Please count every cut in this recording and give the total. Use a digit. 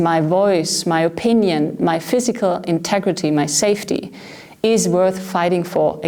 0